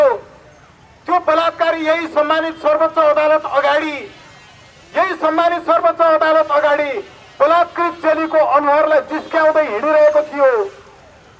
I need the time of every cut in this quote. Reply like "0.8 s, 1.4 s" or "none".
none